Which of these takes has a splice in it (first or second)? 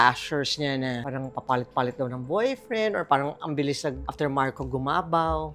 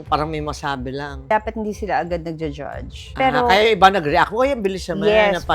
second